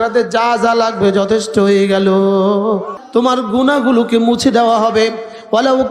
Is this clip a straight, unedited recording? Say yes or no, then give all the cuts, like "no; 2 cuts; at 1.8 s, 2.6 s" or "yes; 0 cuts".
no; 1 cut; at 3.0 s